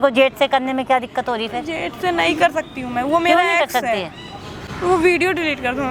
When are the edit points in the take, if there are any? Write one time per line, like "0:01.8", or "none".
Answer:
none